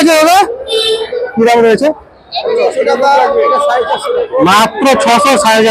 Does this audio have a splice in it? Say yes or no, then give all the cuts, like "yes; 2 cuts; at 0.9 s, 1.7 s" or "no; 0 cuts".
no; 0 cuts